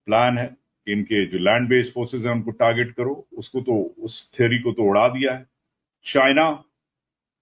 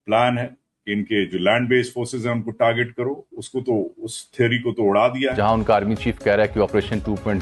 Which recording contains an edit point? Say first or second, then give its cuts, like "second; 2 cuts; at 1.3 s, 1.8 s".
second; 1 cut; at 5.3 s